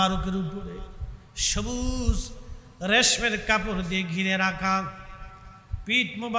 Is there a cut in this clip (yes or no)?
no